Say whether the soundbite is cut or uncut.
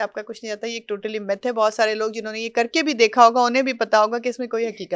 uncut